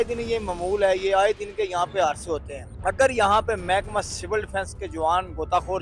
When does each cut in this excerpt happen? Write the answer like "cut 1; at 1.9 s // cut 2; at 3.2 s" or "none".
none

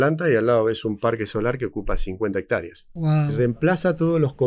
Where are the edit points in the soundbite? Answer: cut 1; at 3.3 s

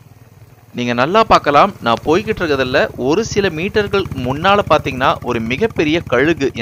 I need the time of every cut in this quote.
none

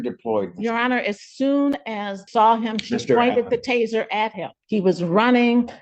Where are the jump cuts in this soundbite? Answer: cut 1; at 2.2 s // cut 2; at 4.6 s

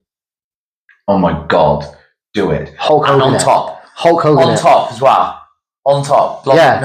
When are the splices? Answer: none

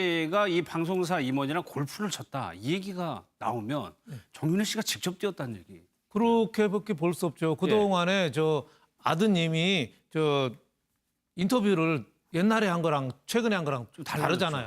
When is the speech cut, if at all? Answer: cut 1; at 9.3 s

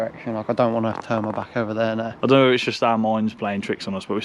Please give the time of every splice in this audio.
cut 1; at 2.1 s

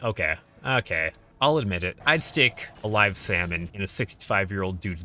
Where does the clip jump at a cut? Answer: cut 1; at 1.2 s // cut 2; at 2.0 s // cut 3; at 2.7 s // cut 4; at 3.7 s

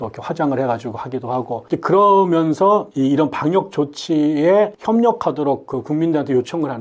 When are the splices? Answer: none

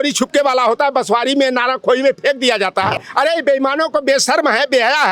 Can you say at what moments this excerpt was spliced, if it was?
cut 1; at 3.1 s

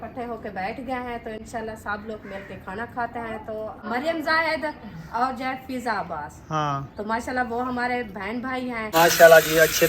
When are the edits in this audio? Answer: cut 1; at 3.6 s // cut 2; at 8.9 s

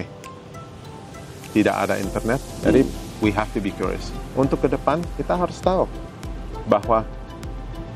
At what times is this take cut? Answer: cut 1; at 2.5 s

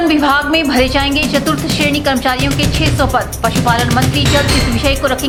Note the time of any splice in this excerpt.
none

